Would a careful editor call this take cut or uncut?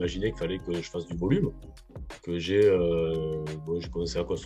uncut